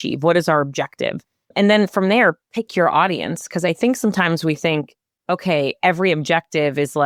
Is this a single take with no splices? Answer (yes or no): yes